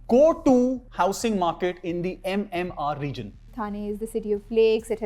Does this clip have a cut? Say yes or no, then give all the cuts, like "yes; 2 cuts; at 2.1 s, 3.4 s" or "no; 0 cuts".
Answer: yes; 2 cuts; at 0.8 s, 3.5 s